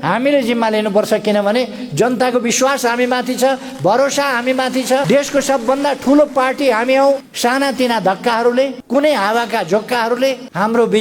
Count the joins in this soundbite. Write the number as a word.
one